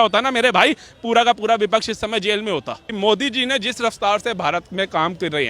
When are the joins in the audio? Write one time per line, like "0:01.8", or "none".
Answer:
0:02.9